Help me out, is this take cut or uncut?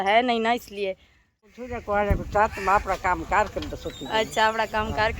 cut